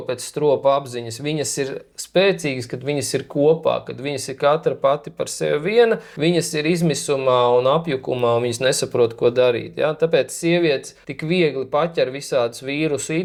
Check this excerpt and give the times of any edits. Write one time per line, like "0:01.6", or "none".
none